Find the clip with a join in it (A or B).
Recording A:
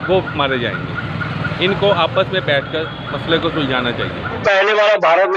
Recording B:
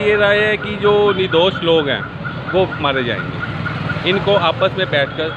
A